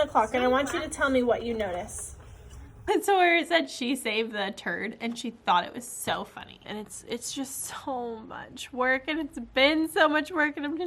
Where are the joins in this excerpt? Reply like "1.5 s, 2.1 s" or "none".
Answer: 2.9 s, 6.7 s